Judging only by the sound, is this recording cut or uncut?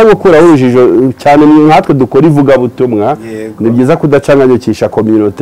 uncut